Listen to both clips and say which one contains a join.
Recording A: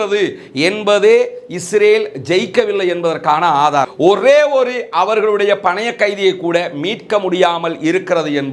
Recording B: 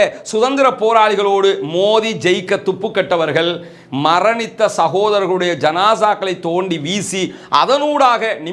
A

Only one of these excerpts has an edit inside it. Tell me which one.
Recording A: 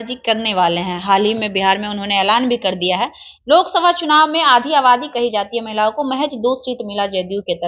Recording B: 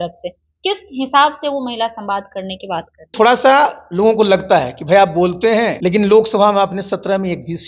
B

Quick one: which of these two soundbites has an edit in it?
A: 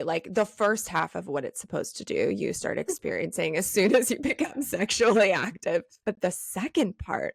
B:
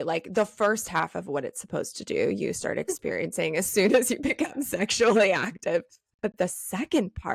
A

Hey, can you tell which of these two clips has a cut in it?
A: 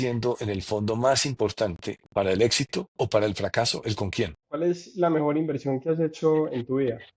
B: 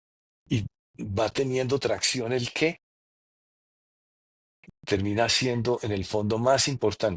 A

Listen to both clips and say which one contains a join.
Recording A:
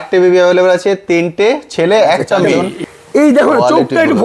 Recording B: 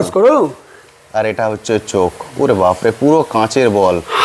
A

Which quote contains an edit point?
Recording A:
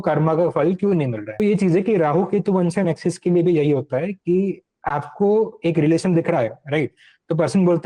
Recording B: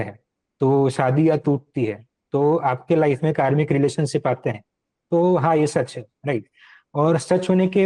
A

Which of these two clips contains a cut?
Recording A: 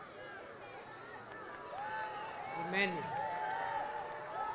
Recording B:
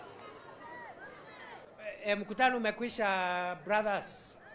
B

